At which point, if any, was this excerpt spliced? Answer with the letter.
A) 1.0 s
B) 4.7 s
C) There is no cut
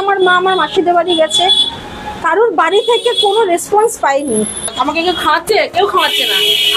B